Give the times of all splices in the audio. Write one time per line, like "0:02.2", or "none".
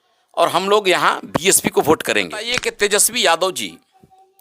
0:02.6

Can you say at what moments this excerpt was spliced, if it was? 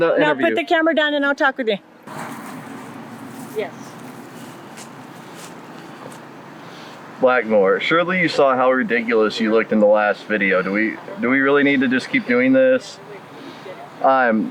0:01.9

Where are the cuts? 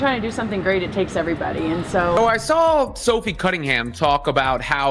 0:02.1

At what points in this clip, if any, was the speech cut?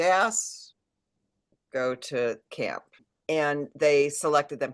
0:02.9

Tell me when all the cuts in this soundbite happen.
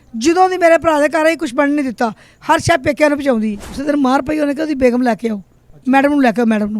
0:03.8

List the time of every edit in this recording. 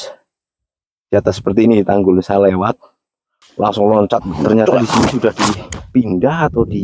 0:04.4

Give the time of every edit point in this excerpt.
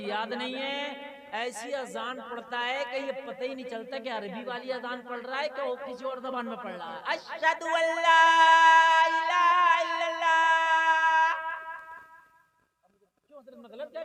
none

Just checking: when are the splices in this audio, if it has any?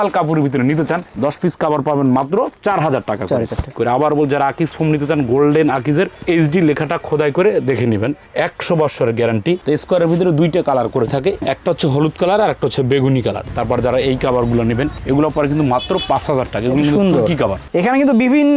0:03.8
0:09.6
0:11.4
0:13.5
0:17.6

